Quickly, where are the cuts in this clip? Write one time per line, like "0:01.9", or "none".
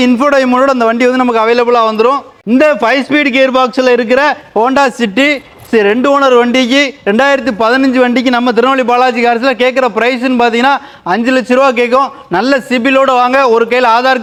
none